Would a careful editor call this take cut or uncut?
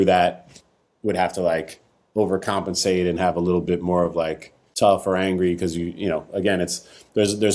cut